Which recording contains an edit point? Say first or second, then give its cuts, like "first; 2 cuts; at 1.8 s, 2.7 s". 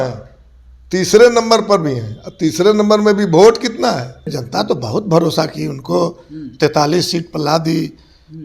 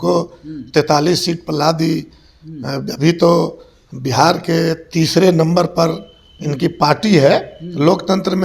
first; 1 cut; at 4.4 s